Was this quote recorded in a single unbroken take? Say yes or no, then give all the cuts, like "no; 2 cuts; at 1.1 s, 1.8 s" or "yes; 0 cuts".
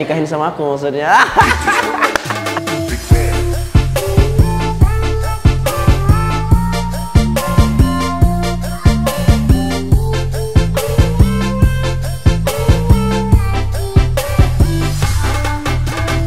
yes; 0 cuts